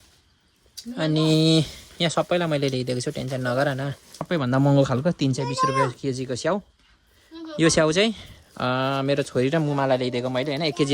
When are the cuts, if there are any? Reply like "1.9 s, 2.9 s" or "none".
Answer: 4.2 s